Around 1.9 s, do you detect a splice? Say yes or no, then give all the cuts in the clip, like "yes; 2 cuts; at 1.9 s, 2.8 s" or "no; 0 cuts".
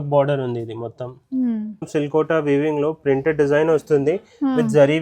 yes; 1 cut; at 1.9 s